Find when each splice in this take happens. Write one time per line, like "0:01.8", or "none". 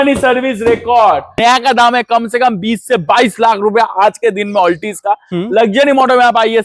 0:01.4